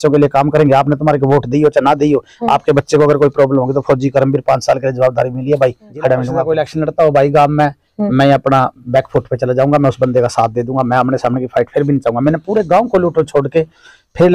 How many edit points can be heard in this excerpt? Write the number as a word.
one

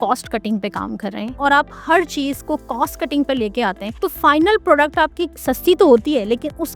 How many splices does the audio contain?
three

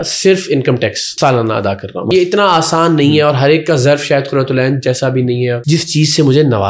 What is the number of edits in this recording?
three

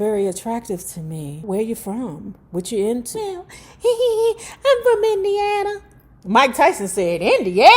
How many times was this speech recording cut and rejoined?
two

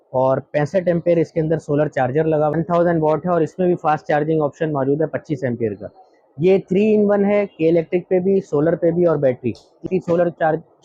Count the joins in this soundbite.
two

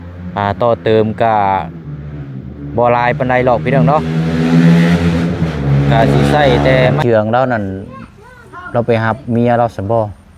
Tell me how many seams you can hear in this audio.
one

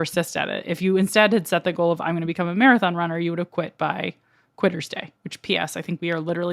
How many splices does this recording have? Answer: one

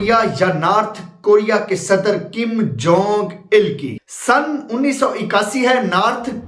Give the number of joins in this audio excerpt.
zero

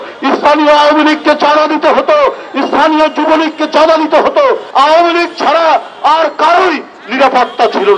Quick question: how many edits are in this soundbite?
one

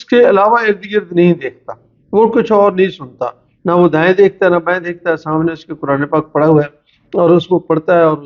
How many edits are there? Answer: zero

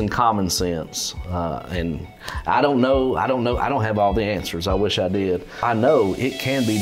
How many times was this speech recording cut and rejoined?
one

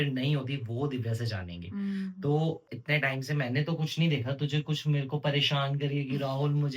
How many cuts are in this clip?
one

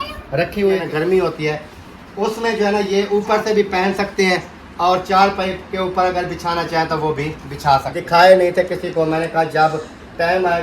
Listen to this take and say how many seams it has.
two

